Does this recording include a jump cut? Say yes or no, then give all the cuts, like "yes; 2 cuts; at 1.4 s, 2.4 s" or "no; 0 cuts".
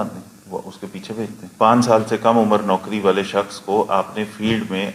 yes; 1 cut; at 1.4 s